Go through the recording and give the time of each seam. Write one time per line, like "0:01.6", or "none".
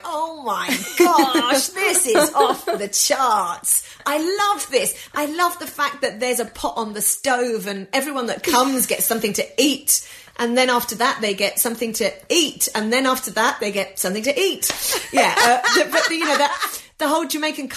none